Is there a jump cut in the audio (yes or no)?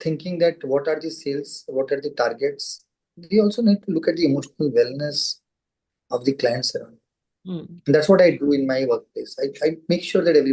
no